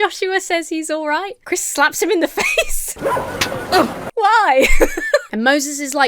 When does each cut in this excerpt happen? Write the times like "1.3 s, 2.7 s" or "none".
1.4 s, 2.8 s, 5.3 s